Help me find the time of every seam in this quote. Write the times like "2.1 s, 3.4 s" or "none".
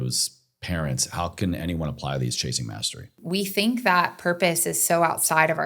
3.2 s

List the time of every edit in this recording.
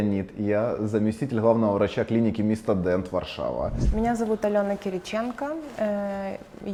none

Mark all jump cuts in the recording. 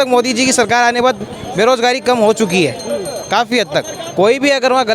4.0 s

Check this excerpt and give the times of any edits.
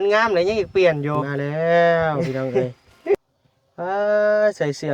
1.3 s, 2.5 s, 3.1 s

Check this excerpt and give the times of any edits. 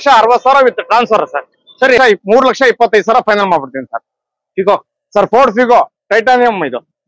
2.0 s

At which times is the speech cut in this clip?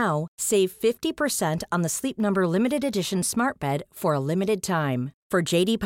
none

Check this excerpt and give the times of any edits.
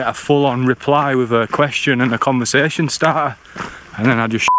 none

